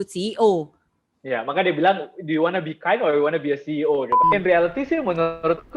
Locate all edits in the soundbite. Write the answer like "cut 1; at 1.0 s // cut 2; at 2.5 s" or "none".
cut 1; at 4.2 s